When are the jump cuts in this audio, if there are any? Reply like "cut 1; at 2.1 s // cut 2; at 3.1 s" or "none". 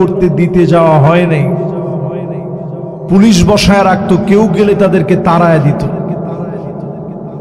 none

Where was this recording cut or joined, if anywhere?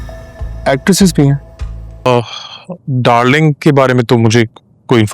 cut 1; at 2.1 s

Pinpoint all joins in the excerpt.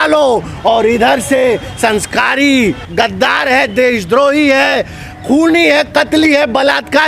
cut 1; at 2.8 s

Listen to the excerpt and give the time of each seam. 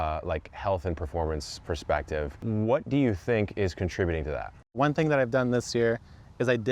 cut 1; at 2.3 s // cut 2; at 4.8 s

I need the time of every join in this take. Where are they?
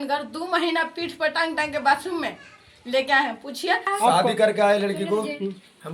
cut 1; at 3.9 s

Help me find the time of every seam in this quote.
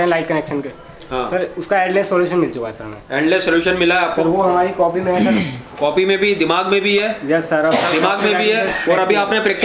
none

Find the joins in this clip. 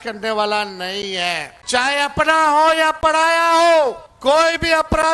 cut 1; at 1.5 s // cut 2; at 4.1 s

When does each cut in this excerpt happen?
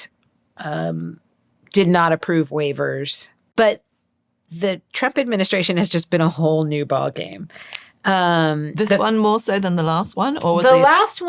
none

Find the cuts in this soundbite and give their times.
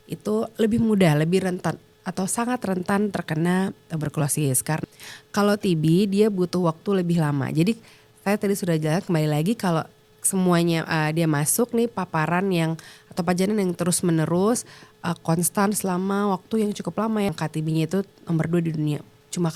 cut 1; at 4.8 s // cut 2; at 17.3 s

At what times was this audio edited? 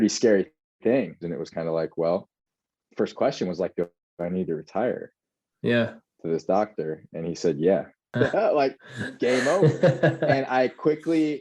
cut 1; at 1.3 s // cut 2; at 8.1 s

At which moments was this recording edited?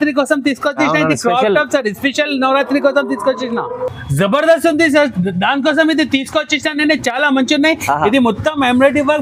none

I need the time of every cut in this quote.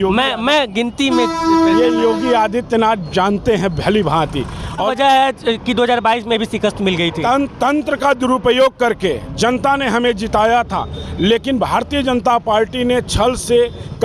cut 1; at 4.9 s

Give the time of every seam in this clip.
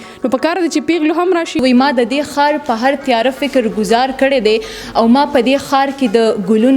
cut 1; at 1.6 s

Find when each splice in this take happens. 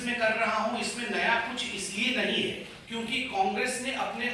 cut 1; at 2.7 s

